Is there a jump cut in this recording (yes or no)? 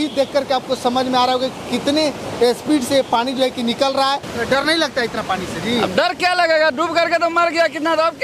yes